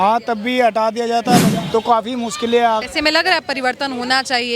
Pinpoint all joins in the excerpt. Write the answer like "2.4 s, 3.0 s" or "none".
1.5 s, 2.8 s